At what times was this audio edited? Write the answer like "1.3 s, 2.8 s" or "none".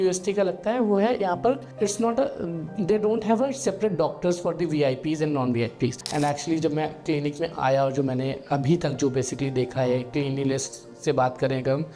6.0 s